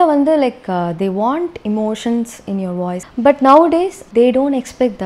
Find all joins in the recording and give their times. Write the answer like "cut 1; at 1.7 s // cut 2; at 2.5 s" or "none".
cut 1; at 3.0 s // cut 2; at 4.0 s